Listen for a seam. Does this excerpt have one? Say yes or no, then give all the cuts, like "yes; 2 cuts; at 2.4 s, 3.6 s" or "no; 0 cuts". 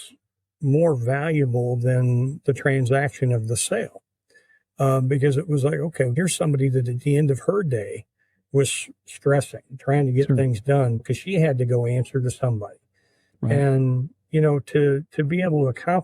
yes; 1 cut; at 6.1 s